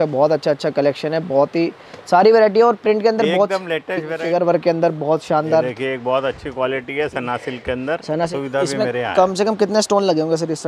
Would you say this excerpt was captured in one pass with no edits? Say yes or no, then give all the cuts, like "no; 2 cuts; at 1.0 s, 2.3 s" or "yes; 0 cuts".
no; 2 cuts; at 4.2 s, 8.3 s